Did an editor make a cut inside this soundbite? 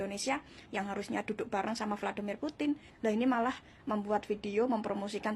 yes; 1 cut; at 2.9 s

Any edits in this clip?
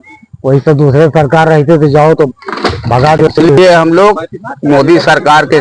yes; 1 cut; at 3.3 s

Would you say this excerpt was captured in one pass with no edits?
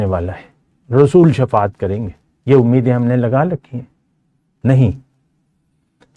yes; 0 cuts

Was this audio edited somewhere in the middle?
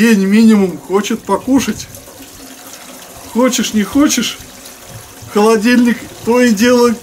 no; 0 cuts

